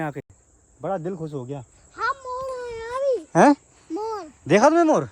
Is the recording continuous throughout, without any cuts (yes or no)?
yes